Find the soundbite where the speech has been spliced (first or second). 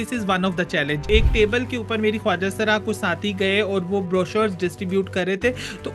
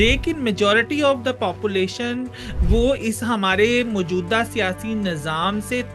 first